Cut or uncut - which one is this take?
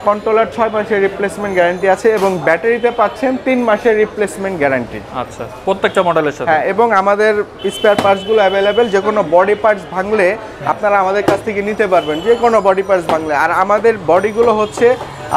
uncut